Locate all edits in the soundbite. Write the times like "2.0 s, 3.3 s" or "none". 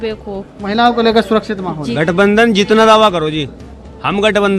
1.9 s